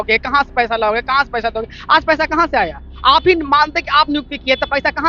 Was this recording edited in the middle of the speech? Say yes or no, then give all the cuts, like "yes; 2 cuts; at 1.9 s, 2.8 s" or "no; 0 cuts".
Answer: no; 0 cuts